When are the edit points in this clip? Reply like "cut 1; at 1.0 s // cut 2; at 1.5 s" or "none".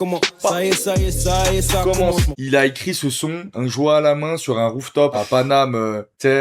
cut 1; at 2.3 s // cut 2; at 3.4 s // cut 3; at 5.1 s